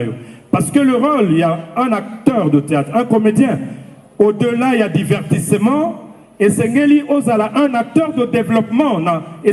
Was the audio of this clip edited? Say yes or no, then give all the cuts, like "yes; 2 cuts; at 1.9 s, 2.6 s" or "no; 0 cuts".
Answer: no; 0 cuts